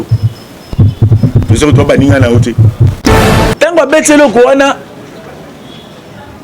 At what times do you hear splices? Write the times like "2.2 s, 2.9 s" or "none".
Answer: 3.1 s